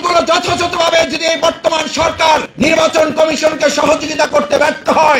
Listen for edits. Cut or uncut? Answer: cut